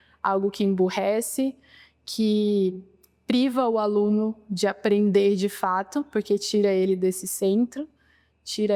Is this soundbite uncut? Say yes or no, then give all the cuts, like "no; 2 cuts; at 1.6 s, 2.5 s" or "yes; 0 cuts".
yes; 0 cuts